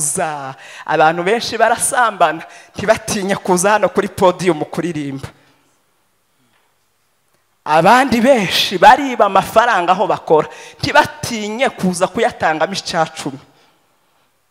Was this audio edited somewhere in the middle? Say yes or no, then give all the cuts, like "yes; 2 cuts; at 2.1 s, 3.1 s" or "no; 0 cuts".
no; 0 cuts